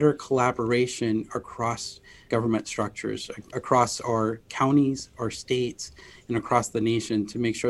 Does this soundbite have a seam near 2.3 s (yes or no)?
yes